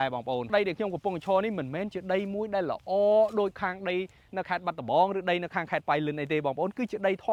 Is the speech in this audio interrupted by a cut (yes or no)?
no